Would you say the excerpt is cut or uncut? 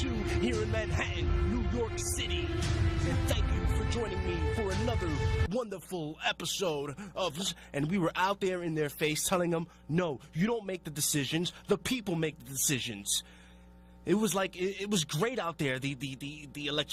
uncut